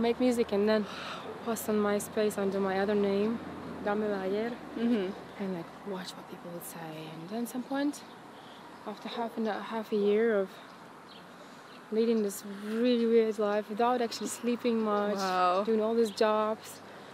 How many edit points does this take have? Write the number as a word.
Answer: zero